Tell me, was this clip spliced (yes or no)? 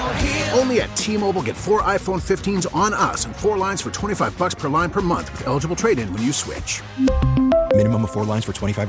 no